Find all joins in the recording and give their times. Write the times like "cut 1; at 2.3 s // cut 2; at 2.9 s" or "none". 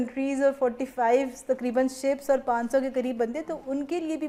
none